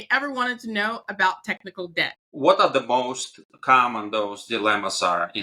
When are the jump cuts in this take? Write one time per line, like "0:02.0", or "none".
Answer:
0:02.2

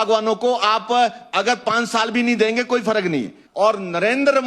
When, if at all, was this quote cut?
0:03.4

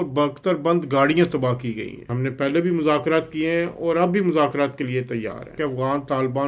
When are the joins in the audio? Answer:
0:02.1
0:05.6

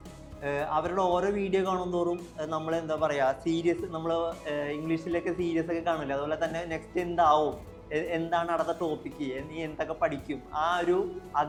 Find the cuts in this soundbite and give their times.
none

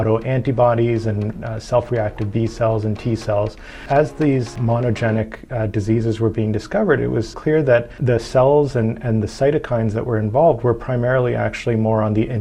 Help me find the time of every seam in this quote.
0:03.8
0:04.5
0:07.5

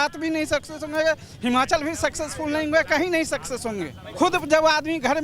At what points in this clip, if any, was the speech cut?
0:04.0

